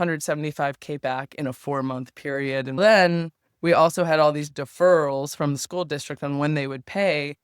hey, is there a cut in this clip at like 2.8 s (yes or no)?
yes